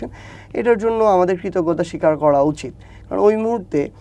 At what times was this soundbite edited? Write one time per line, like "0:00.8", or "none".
none